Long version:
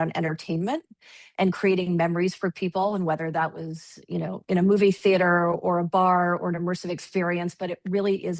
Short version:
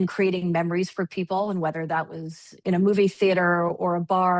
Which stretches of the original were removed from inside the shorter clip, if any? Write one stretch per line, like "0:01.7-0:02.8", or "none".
0:04.0-0:04.4